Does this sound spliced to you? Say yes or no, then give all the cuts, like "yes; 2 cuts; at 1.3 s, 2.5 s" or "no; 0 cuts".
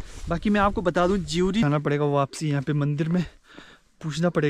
yes; 1 cut; at 1.7 s